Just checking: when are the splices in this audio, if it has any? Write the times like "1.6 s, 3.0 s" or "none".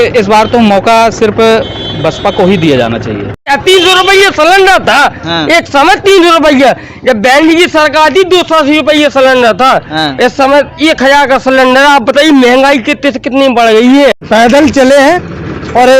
3.4 s, 14.2 s

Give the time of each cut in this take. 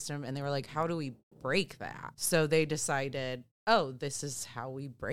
2.1 s

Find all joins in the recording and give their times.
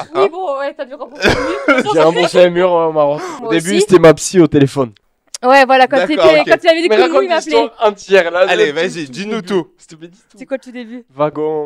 3.3 s

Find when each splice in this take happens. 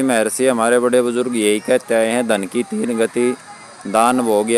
none

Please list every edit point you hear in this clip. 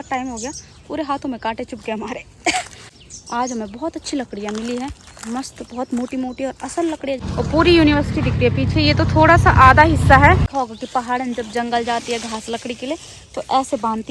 2.9 s, 7.2 s, 10.5 s

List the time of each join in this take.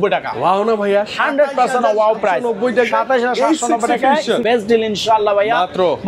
4.4 s

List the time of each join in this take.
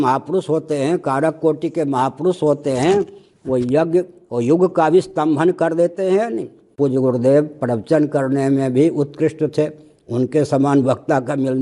6.7 s

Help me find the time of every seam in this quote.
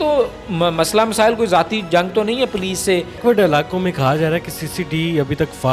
3.2 s

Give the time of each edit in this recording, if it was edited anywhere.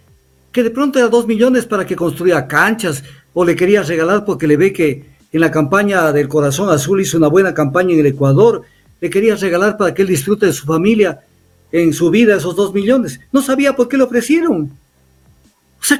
none

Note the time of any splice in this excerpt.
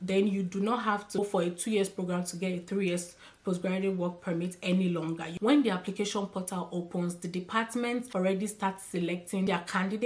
1.2 s, 5.3 s

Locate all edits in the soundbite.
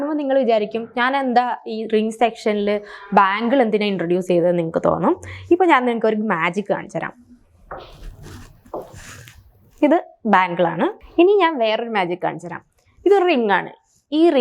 11.0 s

